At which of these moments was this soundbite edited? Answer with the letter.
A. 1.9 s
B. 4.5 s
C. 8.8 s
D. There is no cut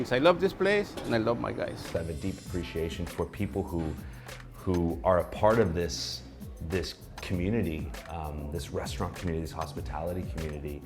A